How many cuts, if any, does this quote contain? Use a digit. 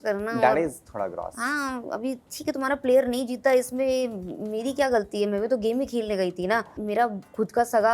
1